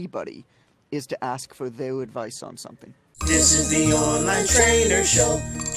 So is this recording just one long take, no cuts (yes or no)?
no